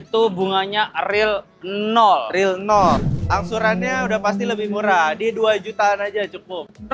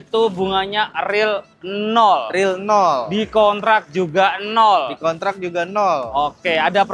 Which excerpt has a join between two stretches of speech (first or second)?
first